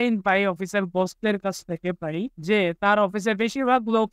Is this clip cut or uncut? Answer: cut